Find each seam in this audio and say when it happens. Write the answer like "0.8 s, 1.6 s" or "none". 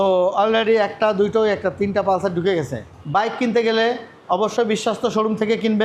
2.8 s